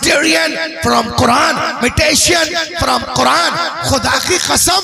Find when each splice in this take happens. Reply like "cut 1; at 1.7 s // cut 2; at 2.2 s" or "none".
cut 1; at 1.7 s